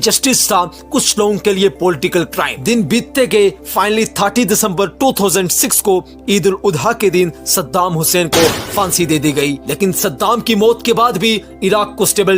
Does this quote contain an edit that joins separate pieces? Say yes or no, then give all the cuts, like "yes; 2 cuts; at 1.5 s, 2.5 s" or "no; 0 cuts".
no; 0 cuts